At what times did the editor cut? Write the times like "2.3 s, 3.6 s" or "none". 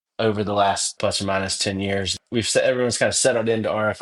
0.9 s, 2.2 s